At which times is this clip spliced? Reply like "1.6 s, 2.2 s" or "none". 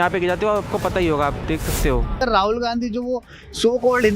2.2 s